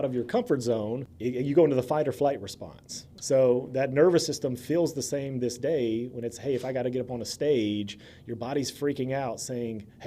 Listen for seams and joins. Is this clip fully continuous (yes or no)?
no